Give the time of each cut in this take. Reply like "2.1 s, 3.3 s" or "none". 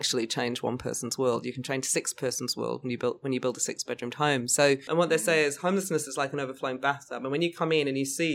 4.8 s